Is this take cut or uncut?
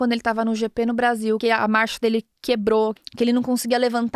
cut